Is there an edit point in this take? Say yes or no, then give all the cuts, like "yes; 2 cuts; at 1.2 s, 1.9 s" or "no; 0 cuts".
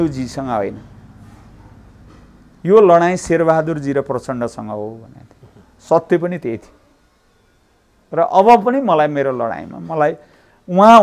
no; 0 cuts